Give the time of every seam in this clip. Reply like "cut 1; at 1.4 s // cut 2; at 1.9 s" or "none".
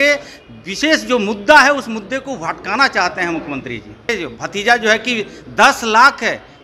cut 1; at 4.1 s